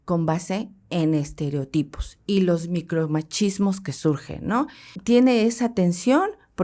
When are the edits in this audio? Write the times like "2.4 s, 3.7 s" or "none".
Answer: 4.9 s